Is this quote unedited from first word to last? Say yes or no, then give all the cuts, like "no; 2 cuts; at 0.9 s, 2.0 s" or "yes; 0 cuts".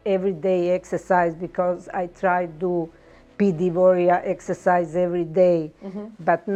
yes; 0 cuts